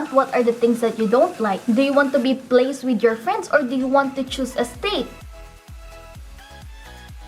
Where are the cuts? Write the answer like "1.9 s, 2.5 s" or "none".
none